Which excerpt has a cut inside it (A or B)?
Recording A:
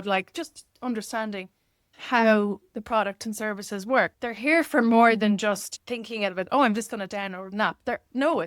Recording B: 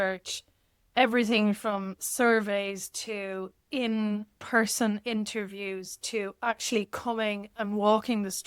A